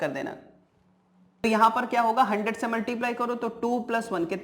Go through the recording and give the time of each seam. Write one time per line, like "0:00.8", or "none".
0:01.4